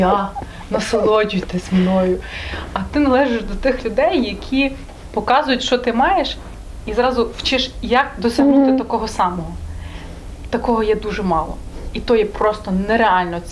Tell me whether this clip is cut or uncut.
uncut